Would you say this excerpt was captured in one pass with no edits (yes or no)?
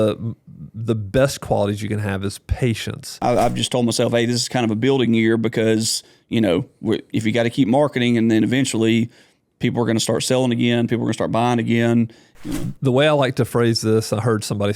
no